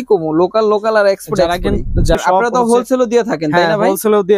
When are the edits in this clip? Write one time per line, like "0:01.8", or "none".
0:02.2